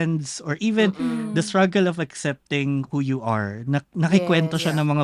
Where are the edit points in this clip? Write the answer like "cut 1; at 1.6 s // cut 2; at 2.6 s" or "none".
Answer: none